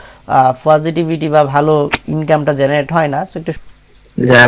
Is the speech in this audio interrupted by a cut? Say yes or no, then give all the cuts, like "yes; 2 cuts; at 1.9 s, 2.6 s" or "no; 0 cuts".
yes; 1 cut; at 3.6 s